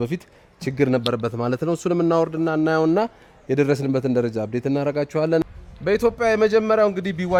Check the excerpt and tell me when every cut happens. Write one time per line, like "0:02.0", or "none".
none